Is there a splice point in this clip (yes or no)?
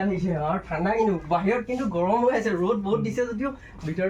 no